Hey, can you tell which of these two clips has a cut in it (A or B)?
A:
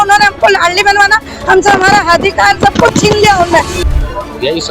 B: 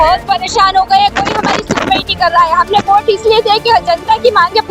A